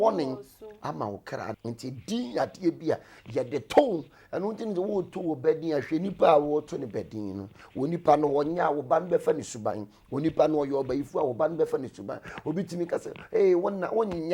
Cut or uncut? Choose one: cut